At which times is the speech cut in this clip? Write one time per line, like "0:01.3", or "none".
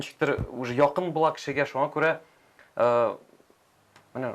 none